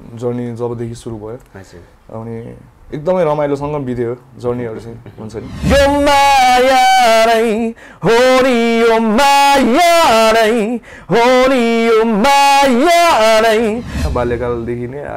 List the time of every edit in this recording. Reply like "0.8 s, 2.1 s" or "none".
5.5 s, 14.0 s